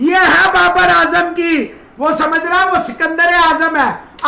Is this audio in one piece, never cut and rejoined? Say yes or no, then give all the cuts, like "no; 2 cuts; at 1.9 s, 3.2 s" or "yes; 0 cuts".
yes; 0 cuts